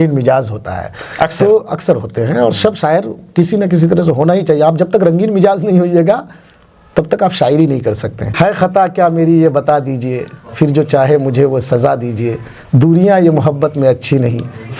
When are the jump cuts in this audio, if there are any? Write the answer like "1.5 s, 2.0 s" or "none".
8.3 s

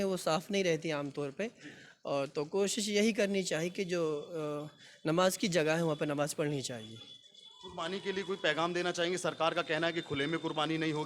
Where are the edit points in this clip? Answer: none

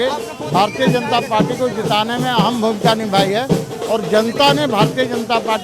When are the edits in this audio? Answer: none

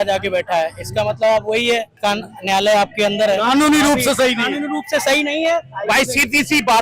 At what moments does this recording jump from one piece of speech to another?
1.9 s

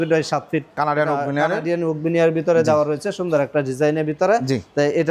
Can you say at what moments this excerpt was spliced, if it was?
none

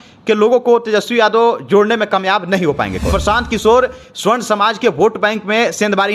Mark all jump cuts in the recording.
3.1 s

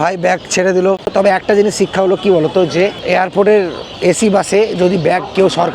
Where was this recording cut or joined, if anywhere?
1.0 s

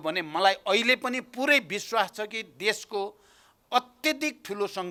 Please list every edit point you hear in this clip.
none

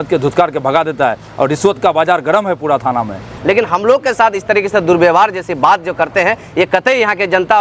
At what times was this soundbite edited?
3.2 s

